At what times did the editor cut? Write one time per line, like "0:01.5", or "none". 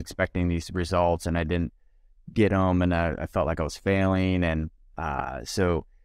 none